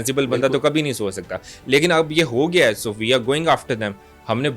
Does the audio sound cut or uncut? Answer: uncut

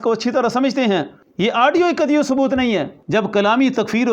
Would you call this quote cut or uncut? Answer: cut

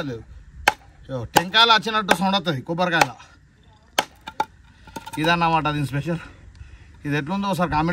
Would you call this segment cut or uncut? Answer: uncut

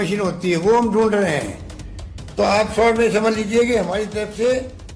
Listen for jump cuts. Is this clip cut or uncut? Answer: uncut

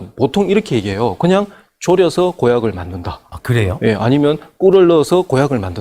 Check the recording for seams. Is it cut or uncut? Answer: uncut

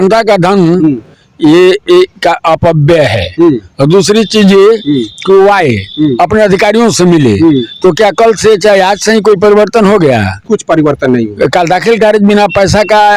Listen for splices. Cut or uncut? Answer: uncut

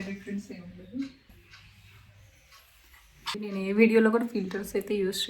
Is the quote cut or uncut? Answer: cut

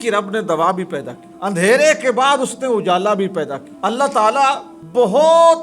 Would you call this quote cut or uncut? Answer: uncut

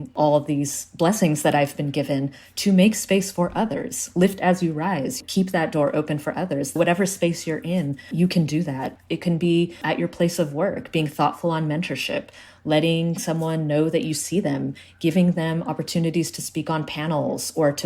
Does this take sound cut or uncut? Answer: uncut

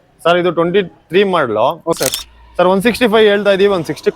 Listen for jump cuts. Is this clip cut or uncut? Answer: cut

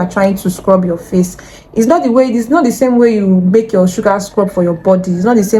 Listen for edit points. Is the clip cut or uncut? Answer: uncut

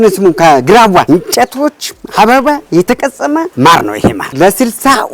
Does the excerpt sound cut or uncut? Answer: cut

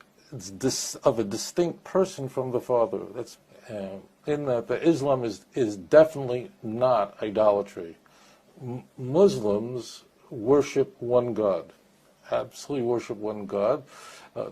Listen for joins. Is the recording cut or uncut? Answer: cut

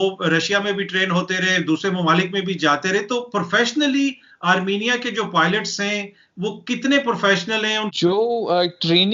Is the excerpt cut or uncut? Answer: uncut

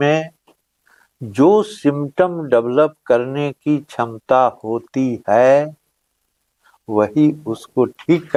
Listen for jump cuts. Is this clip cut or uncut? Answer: uncut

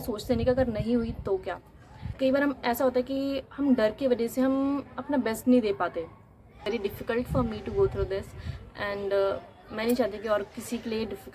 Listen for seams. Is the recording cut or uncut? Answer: cut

